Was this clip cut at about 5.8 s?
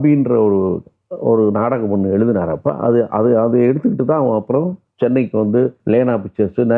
yes; 1 cut; at 5.8 s

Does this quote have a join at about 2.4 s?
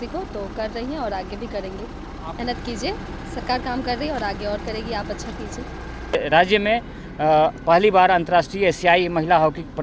yes; 2 cuts; at 2.4 s, 6.1 s

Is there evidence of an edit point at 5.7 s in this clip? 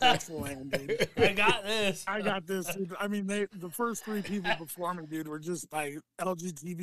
yes; 2 cuts; at 2.1 s, 5.7 s

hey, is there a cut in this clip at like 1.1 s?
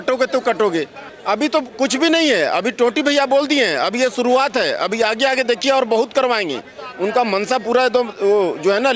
yes; 1 cut; at 1.1 s

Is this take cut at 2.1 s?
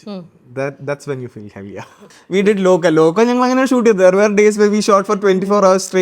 yes; 1 cut; at 2.1 s

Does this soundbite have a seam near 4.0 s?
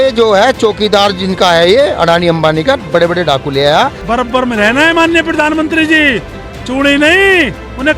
yes; 1 cut; at 4.0 s

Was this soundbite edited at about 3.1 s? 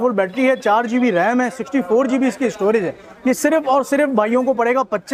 no; 0 cuts

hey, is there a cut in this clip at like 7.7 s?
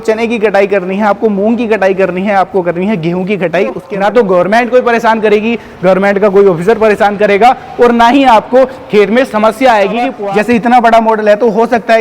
no; 2 cuts; at 3.9 s, 10.2 s

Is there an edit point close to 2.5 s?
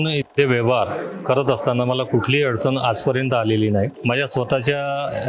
no; 1 cut; at 4.0 s

